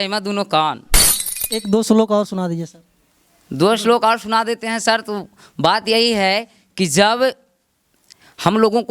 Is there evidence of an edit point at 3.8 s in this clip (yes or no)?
no